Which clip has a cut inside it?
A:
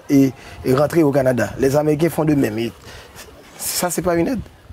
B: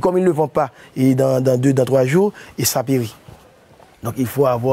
B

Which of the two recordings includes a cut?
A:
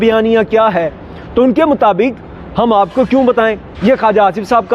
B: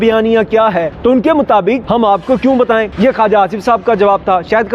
B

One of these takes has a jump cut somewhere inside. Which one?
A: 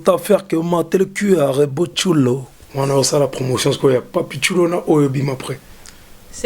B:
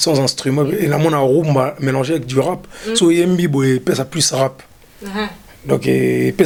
A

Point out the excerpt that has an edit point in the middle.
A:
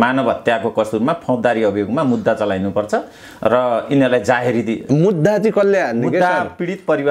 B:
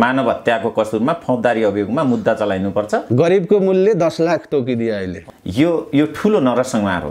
B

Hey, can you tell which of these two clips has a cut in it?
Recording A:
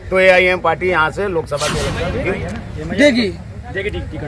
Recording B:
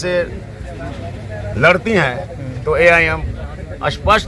A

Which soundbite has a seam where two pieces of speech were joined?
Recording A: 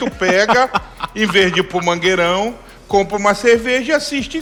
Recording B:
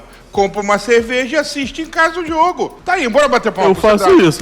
B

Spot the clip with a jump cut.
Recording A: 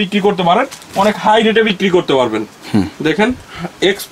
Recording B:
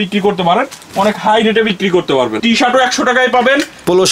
B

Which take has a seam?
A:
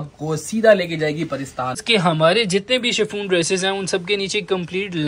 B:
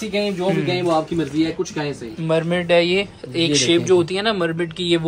A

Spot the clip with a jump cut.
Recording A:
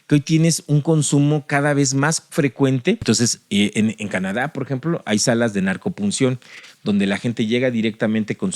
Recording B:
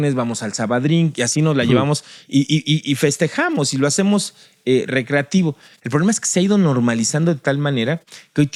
A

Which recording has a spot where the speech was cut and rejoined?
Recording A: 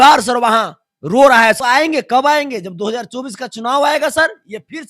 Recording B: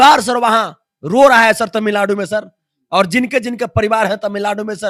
A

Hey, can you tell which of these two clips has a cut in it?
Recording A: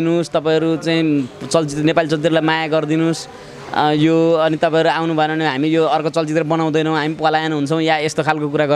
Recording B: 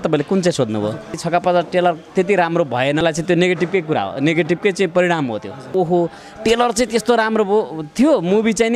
B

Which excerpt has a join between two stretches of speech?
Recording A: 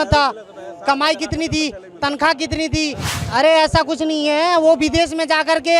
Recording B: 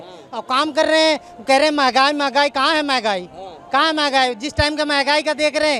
A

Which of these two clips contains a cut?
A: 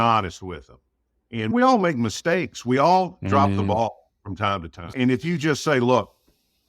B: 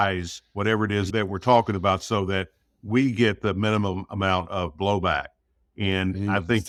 A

